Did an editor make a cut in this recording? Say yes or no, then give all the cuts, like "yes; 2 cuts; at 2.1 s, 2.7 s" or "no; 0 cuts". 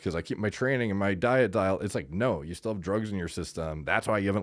no; 0 cuts